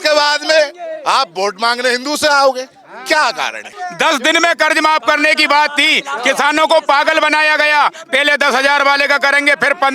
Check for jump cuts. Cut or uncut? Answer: cut